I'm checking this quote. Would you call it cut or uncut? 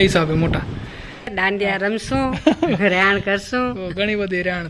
cut